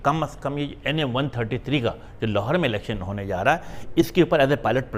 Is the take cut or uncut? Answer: uncut